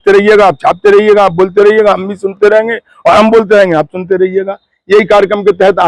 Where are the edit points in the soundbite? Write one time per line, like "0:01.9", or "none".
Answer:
none